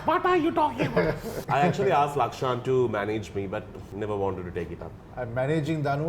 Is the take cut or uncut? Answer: cut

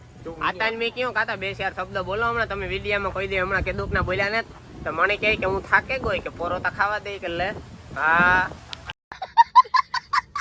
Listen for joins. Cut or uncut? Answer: uncut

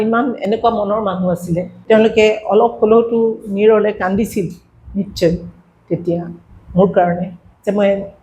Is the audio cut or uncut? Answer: cut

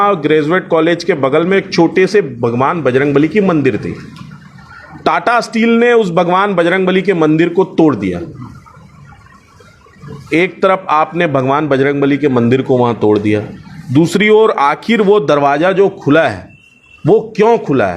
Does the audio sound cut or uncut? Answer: uncut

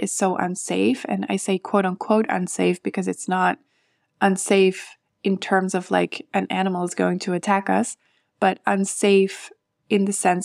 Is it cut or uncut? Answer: uncut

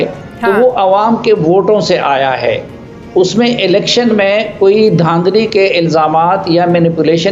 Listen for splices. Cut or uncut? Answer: uncut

